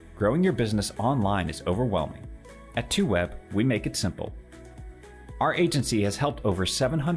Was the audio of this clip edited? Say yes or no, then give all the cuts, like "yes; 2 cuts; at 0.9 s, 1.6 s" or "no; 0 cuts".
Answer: no; 0 cuts